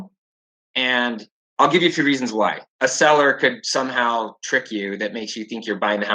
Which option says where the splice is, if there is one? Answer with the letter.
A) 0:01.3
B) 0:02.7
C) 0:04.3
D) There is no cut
B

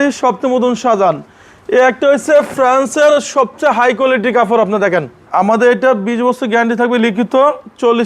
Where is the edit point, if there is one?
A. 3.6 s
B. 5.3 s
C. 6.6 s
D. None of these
B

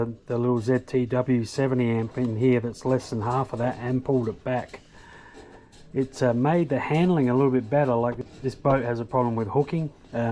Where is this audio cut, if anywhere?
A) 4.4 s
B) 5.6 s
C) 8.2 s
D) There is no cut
C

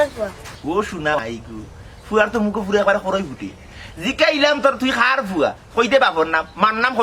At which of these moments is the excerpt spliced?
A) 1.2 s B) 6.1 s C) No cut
A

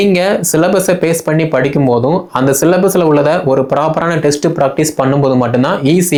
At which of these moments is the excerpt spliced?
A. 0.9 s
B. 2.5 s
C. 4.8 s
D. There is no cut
D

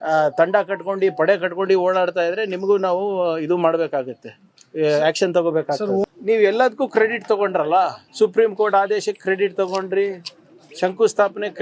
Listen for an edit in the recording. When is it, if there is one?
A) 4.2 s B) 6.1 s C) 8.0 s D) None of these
B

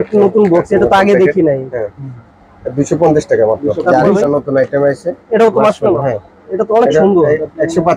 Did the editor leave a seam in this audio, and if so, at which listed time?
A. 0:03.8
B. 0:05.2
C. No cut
A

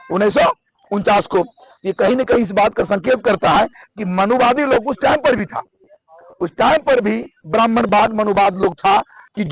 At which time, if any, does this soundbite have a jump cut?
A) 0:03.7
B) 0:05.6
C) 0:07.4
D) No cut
D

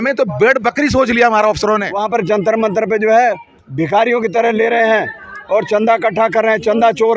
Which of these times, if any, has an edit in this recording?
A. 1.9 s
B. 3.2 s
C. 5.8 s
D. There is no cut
A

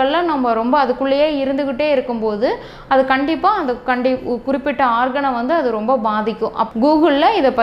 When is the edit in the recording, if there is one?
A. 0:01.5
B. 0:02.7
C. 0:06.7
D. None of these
C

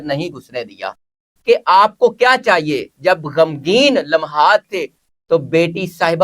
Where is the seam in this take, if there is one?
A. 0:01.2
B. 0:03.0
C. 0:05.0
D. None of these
A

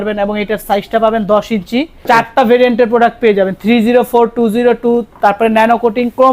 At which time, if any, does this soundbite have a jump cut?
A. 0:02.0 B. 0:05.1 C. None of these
A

